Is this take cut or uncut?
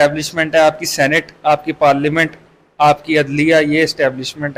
uncut